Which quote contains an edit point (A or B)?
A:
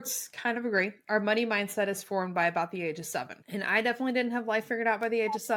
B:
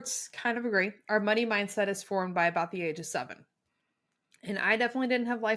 A